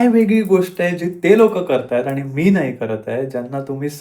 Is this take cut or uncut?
uncut